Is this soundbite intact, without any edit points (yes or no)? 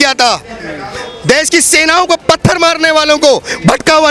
yes